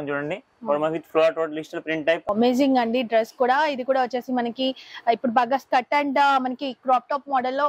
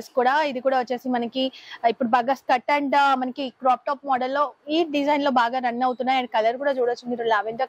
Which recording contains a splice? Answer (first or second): first